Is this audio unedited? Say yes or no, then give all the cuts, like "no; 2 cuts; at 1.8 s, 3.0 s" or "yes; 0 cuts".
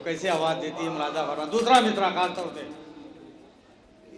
yes; 0 cuts